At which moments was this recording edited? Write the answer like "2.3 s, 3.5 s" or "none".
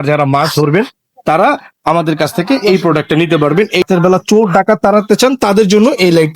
3.9 s